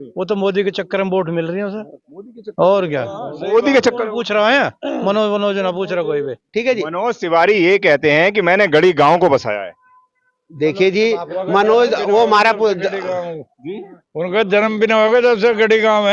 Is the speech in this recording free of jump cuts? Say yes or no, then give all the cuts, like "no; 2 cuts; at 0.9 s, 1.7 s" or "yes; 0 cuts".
no; 1 cut; at 6.4 s